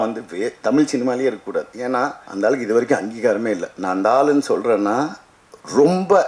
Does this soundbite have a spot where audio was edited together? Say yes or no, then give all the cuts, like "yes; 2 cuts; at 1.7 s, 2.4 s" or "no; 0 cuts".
yes; 1 cut; at 2.2 s